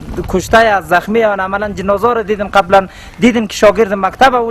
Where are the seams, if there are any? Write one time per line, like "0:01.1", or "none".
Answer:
none